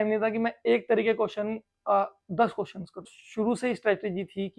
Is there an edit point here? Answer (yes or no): yes